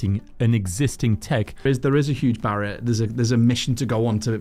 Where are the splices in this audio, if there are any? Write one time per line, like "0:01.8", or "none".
0:01.7